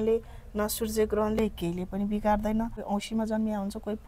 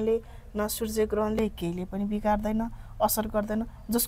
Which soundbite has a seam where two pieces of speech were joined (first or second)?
first